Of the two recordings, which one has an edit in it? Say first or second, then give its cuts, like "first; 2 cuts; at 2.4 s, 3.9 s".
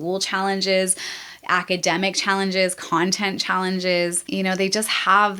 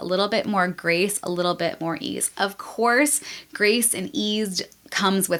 first; 1 cut; at 4.2 s